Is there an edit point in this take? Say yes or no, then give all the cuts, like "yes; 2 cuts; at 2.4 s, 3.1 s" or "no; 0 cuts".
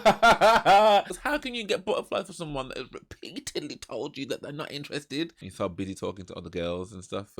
yes; 2 cuts; at 1.2 s, 5.5 s